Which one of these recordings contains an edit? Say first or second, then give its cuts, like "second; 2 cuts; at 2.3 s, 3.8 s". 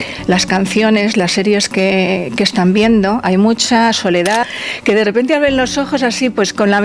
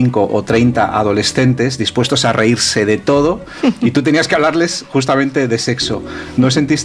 first; 2 cuts; at 3.2 s, 4.5 s